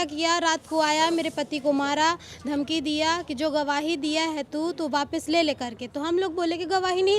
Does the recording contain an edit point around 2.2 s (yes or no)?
no